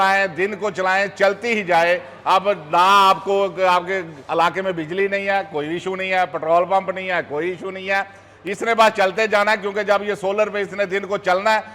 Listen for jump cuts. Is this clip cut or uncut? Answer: uncut